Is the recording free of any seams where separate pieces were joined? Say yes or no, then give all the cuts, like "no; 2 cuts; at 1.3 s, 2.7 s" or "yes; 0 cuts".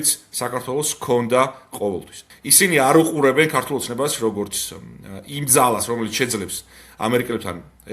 no; 1 cut; at 2.1 s